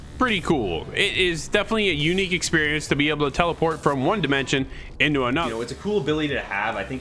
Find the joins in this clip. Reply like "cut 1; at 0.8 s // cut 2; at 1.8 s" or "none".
cut 1; at 5.5 s